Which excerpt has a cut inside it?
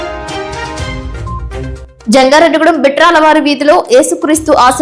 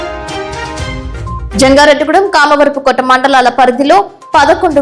second; 1 cut; at 1.5 s

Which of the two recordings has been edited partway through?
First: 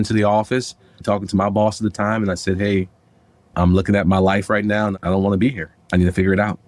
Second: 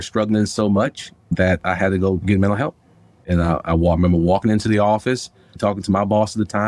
first; 1 cut; at 4.9 s

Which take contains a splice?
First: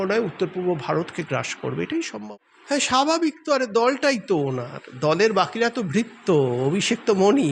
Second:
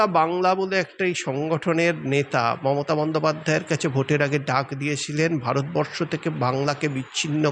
first; 1 cut; at 2.1 s

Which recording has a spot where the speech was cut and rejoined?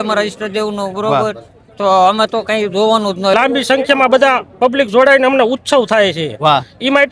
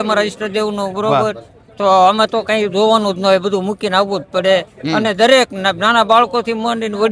first; 1 cut; at 3.3 s

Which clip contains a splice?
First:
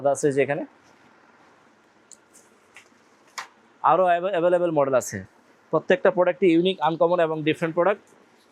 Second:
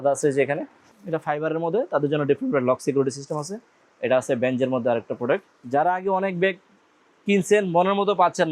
second; 2 cuts; at 0.9 s, 5.6 s

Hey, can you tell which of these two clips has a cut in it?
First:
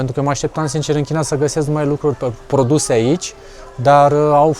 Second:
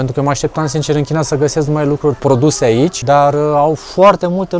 second; 2 cuts; at 2.2 s, 3.0 s

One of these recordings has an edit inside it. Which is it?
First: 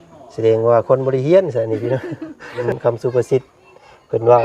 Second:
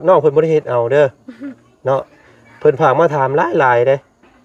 first; 1 cut; at 2.6 s

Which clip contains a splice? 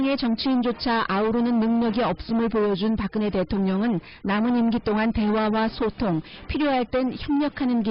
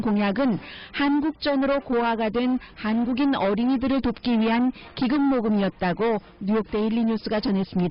second; 1 cut; at 5.3 s

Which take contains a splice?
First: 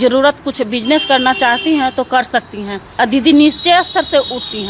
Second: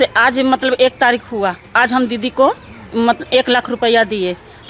first; 1 cut; at 2.8 s

